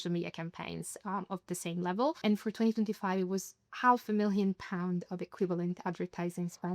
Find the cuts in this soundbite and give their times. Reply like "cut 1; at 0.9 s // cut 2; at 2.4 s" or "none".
cut 1; at 2.2 s